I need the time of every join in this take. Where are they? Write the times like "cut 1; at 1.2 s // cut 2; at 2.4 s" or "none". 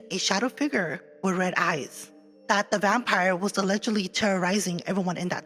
cut 1; at 2.2 s